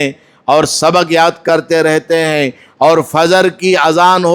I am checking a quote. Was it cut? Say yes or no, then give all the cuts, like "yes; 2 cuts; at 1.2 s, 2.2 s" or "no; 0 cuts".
no; 0 cuts